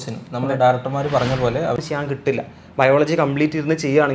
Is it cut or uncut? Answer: cut